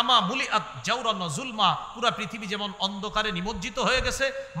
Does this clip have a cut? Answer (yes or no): no